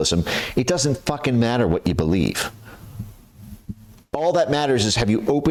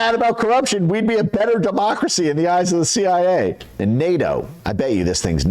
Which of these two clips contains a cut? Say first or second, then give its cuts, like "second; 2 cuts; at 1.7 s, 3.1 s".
second; 1 cut; at 3.7 s